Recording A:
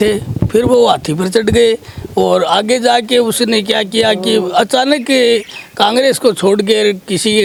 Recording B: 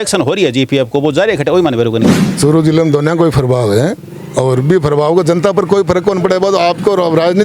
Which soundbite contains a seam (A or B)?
B